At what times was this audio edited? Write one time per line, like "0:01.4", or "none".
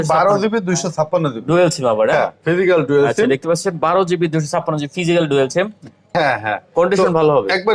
0:06.1